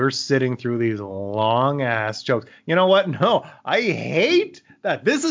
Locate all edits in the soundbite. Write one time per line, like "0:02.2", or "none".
none